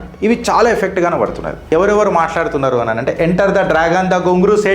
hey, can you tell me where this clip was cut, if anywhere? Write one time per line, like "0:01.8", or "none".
0:01.7